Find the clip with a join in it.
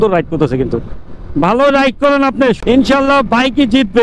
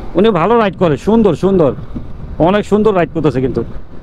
first; 1 cut; at 2.6 s

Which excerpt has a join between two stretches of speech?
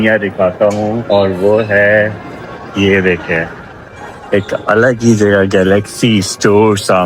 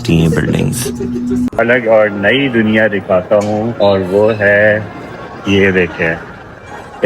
second; 1 cut; at 1.6 s

